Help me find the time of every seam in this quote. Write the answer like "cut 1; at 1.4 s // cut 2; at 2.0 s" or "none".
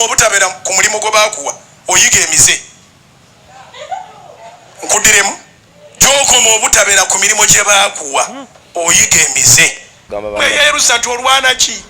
cut 1; at 10.0 s